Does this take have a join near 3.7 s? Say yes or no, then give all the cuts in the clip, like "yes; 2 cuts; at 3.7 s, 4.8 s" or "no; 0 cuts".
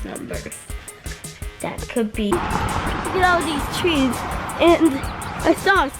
no; 1 cut; at 2.3 s